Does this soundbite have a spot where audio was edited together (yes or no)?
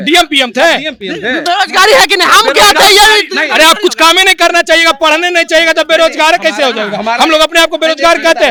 no